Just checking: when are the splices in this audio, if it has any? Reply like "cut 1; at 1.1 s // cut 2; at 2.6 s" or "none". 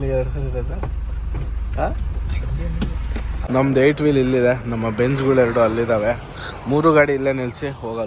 cut 1; at 3.4 s